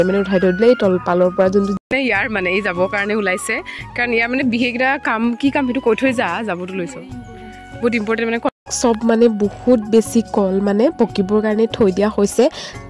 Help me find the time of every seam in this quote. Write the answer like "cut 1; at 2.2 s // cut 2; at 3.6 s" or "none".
cut 1; at 1.8 s // cut 2; at 8.6 s